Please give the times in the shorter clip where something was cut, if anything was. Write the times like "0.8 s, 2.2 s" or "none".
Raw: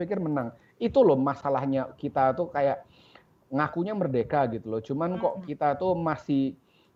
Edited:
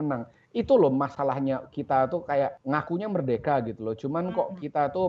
2.6 s